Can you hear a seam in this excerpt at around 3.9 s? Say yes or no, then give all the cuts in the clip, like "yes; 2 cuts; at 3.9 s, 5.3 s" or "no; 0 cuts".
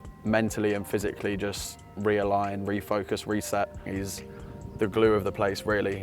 yes; 1 cut; at 3.9 s